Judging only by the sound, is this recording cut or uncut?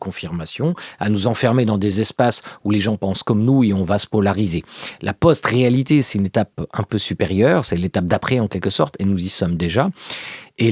uncut